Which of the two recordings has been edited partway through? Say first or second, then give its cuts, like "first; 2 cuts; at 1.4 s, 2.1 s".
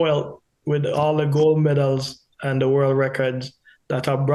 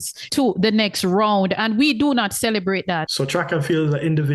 second; 1 cut; at 3.1 s